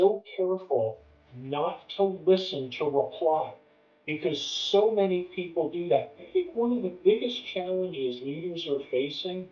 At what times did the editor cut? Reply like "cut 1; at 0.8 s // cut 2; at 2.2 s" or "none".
cut 1; at 6.2 s